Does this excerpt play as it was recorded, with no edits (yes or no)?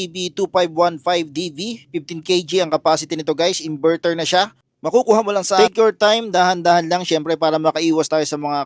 no